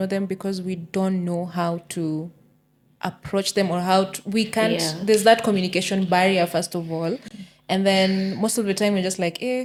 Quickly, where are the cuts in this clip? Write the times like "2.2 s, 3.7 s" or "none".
none